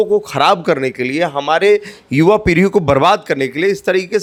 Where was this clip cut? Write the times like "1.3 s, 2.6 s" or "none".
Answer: none